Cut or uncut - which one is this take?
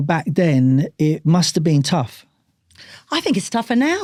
uncut